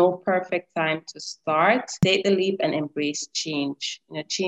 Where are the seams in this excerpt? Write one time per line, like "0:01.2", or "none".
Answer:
0:02.0